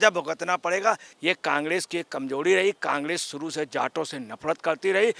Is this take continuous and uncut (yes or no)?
no